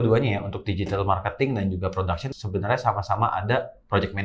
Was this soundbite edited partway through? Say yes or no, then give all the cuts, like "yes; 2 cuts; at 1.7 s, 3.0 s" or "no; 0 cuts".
no; 0 cuts